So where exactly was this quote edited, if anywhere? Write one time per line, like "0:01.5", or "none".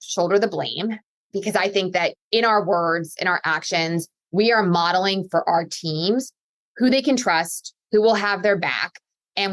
none